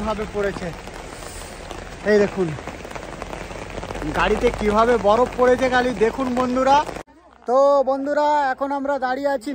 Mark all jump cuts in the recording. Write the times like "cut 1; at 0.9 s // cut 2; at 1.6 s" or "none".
cut 1; at 7.1 s